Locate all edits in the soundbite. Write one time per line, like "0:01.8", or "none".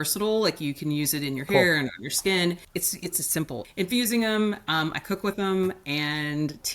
0:03.6